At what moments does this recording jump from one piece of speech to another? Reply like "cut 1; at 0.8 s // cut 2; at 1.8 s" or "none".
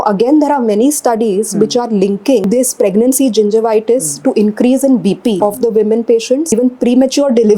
cut 1; at 2.4 s // cut 2; at 5.4 s // cut 3; at 6.5 s